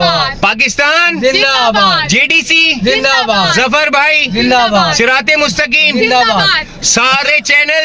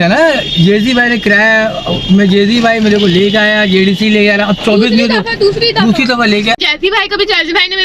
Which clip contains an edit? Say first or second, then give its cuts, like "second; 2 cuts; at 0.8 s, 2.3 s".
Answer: second; 1 cut; at 6.5 s